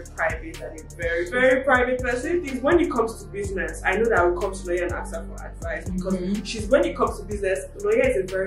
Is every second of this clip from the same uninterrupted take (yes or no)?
no